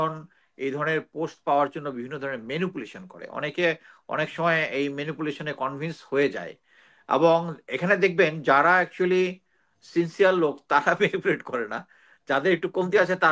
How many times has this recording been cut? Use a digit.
0